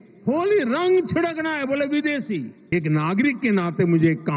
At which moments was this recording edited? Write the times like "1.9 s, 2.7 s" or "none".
2.6 s